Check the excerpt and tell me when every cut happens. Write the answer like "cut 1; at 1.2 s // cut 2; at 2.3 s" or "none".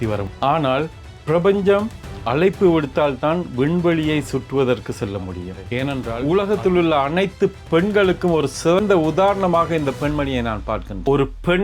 cut 1; at 5.9 s